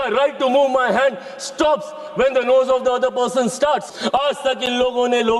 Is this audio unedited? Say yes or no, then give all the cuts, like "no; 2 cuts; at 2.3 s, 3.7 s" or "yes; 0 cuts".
no; 1 cut; at 3.9 s